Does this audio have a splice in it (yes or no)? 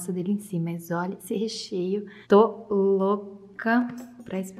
no